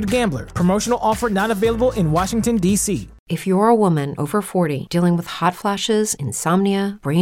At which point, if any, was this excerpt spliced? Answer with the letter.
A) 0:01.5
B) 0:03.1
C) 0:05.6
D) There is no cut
B